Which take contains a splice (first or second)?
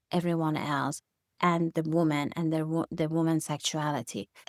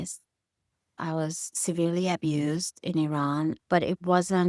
second